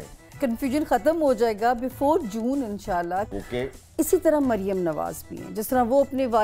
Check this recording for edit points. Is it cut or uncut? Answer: cut